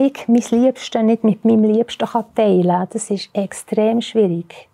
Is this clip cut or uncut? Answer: uncut